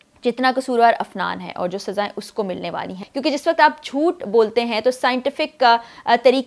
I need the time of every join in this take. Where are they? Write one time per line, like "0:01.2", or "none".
0:03.1